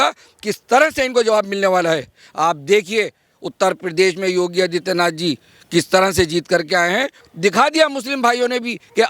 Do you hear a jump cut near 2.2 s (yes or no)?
yes